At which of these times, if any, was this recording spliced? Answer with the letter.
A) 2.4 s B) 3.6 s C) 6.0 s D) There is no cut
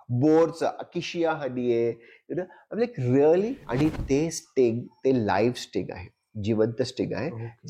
B